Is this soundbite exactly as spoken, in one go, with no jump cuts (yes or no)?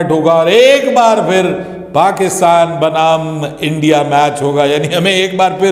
yes